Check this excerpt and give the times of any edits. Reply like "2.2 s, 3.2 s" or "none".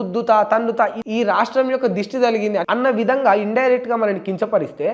1.0 s, 2.6 s